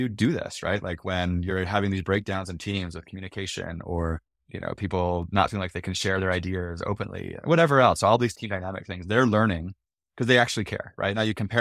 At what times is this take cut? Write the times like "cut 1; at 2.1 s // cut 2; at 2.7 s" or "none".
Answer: cut 1; at 8.4 s